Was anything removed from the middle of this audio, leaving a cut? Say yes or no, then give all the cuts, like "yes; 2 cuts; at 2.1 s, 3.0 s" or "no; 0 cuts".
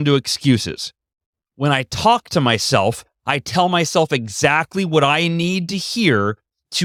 no; 0 cuts